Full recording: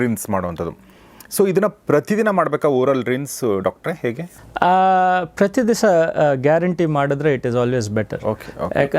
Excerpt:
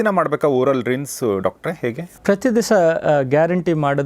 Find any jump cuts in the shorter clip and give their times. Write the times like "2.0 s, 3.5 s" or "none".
2.2 s